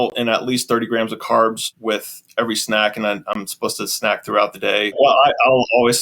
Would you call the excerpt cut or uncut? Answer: cut